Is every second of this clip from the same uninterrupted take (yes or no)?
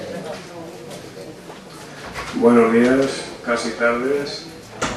no